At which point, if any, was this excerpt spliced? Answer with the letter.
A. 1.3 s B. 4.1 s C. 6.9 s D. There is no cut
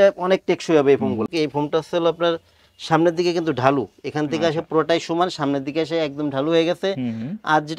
A